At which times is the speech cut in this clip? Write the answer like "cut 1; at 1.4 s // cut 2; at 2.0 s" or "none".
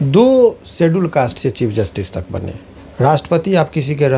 cut 1; at 2.6 s